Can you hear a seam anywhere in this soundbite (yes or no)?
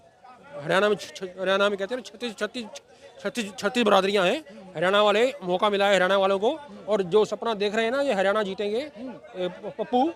yes